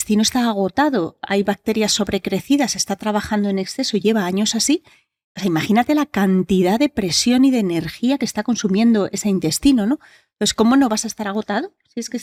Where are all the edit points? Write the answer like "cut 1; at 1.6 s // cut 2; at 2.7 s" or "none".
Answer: none

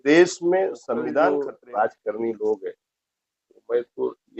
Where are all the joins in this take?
cut 1; at 1.3 s

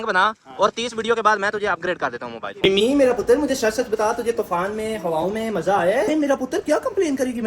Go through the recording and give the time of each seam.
cut 1; at 2.5 s // cut 2; at 6.1 s

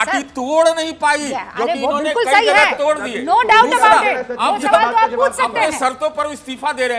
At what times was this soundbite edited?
none

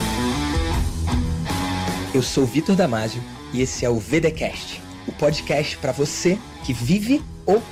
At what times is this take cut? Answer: none

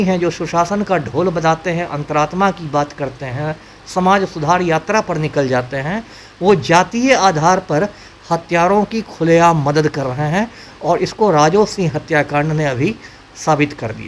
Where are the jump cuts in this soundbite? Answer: none

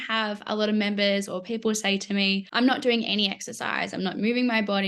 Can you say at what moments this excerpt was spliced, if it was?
cut 1; at 2.5 s

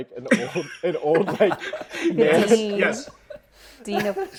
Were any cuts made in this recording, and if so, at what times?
none

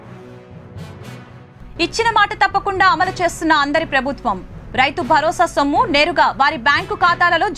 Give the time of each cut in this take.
cut 1; at 1.1 s

